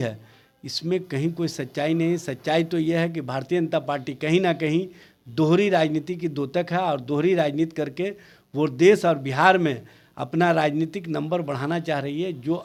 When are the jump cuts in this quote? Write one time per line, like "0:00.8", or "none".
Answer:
none